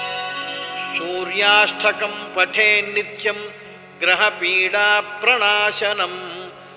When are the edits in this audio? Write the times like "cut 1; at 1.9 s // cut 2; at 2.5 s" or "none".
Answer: cut 1; at 0.9 s